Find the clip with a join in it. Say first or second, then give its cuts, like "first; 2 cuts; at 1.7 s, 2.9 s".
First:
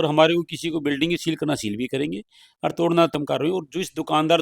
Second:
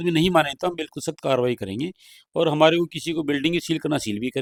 first; 1 cut; at 3.1 s